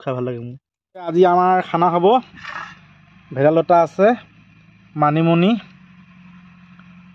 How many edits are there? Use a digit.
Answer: 1